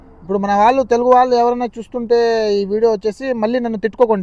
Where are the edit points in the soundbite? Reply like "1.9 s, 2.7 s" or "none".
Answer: none